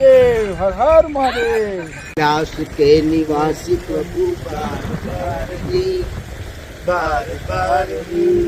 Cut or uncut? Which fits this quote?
cut